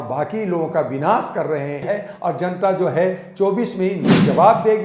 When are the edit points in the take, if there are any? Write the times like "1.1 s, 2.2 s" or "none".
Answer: 1.8 s